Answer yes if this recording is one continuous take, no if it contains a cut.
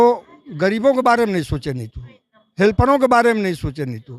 yes